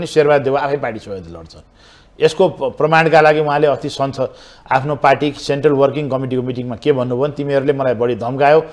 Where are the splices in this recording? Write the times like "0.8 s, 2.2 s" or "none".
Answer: none